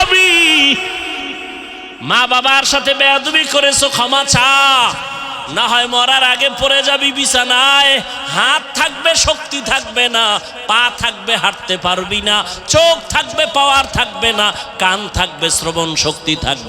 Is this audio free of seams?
no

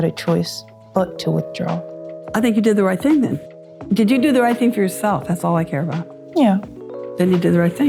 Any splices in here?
no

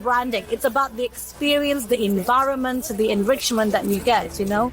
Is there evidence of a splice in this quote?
no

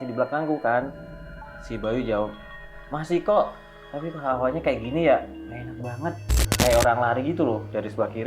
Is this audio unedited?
no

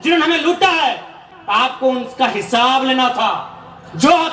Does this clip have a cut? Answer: no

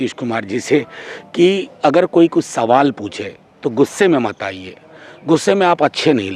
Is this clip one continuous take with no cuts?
yes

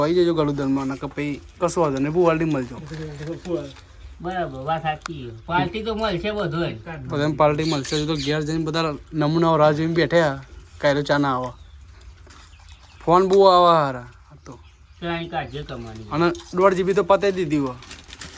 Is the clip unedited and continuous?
yes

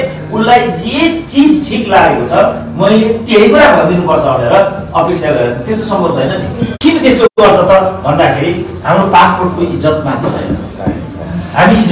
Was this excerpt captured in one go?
no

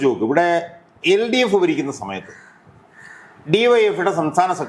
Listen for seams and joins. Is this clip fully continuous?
yes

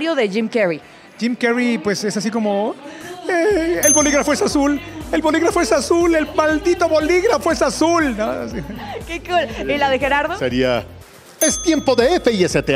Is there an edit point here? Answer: no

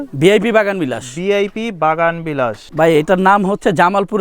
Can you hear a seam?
yes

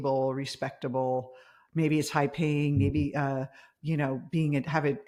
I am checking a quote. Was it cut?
no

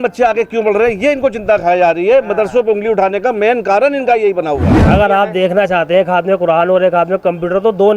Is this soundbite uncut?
no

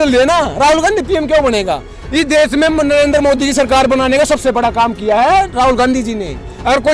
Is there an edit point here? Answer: no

